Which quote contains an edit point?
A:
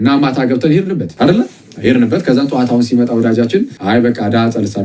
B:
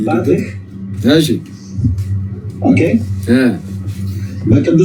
A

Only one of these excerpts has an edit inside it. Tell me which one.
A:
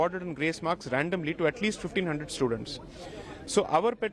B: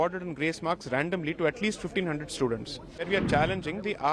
B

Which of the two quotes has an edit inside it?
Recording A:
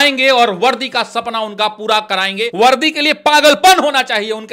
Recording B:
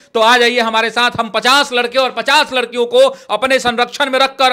A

